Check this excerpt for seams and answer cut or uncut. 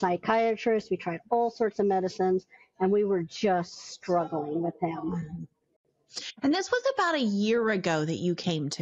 uncut